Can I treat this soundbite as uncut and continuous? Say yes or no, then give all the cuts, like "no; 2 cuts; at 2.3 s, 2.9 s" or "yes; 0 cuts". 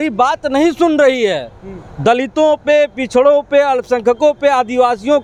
yes; 0 cuts